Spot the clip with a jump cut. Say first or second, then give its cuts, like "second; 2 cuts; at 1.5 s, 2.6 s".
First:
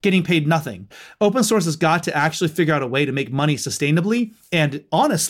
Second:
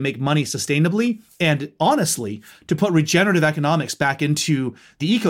first; 1 cut; at 1.0 s